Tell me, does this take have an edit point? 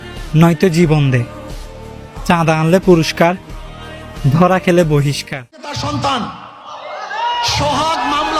yes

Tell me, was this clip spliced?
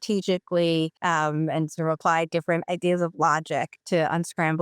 yes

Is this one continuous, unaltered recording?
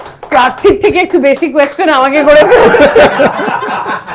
yes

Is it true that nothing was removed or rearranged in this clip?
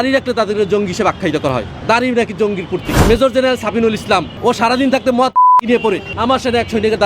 no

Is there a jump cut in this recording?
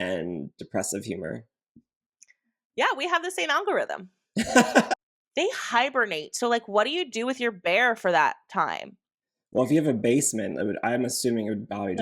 yes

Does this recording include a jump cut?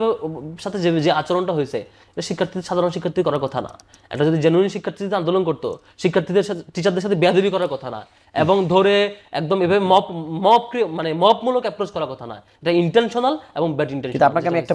no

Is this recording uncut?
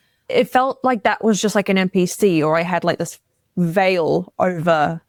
yes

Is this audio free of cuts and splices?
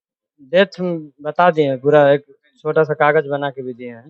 yes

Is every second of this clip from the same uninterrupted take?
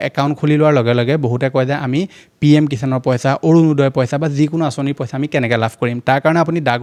yes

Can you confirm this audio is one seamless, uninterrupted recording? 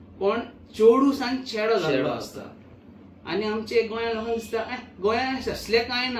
yes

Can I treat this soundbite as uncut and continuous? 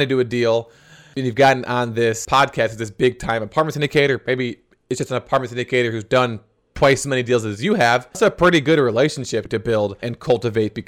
no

